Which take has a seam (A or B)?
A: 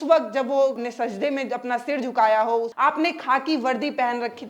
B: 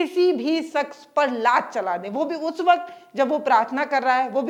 A